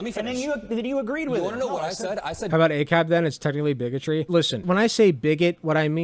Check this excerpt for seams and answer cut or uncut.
uncut